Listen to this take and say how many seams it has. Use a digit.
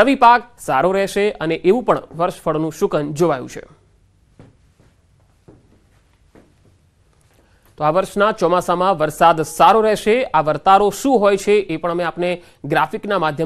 1